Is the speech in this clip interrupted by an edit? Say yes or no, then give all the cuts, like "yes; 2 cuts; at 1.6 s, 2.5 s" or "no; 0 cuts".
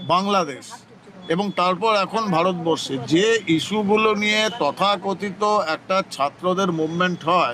no; 0 cuts